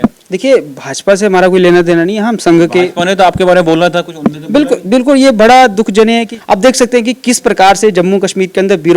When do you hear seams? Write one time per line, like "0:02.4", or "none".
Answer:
0:06.3